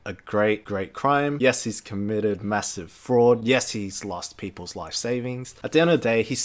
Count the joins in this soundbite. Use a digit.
2